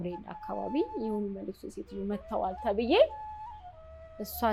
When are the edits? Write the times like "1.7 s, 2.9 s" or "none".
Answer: none